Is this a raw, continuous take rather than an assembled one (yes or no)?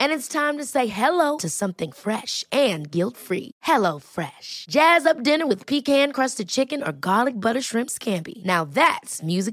yes